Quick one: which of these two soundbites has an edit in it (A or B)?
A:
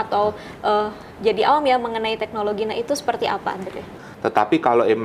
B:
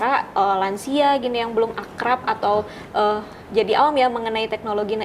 A